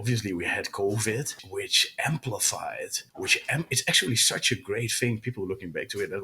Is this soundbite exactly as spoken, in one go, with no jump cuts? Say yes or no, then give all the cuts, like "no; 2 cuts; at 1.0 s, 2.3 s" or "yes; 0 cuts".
no; 2 cuts; at 1.4 s, 3.0 s